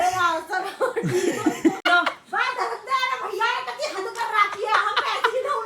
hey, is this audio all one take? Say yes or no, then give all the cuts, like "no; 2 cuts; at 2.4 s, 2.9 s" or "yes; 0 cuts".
no; 1 cut; at 1.8 s